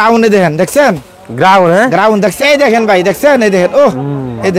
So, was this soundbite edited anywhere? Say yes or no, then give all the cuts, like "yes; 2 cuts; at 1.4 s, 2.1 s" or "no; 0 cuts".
yes; 1 cut; at 2.4 s